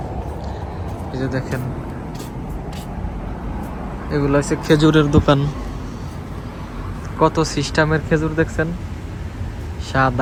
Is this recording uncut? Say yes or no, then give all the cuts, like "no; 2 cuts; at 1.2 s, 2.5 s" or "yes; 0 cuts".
yes; 0 cuts